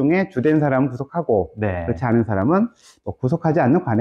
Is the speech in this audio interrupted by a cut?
no; 0 cuts

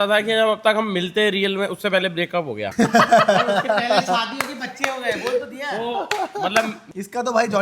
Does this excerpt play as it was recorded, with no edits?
yes; 0 cuts

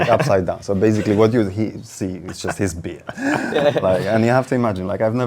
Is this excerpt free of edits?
yes; 0 cuts

